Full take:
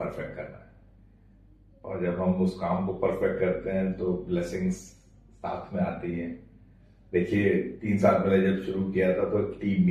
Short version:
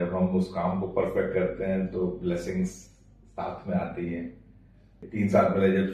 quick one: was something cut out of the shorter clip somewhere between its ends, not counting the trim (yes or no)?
yes